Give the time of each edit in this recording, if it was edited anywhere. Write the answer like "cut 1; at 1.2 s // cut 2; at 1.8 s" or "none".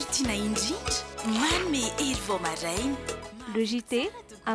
none